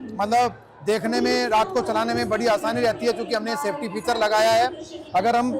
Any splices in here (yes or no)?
no